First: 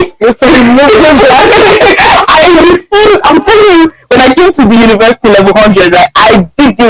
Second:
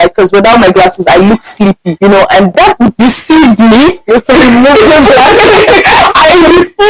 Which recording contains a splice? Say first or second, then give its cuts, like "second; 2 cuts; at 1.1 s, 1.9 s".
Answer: second; 2 cuts; at 1.9 s, 2.5 s